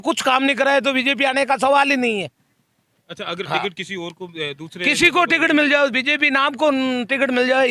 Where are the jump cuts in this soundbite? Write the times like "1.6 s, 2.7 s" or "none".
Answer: none

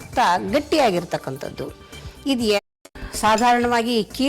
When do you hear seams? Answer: 2.6 s

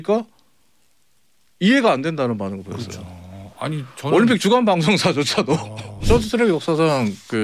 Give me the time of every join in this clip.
6.0 s

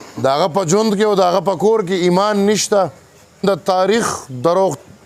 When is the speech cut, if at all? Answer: 3.4 s

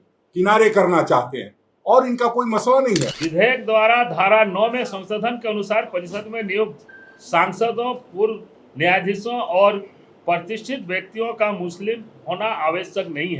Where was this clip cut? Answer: 3.1 s

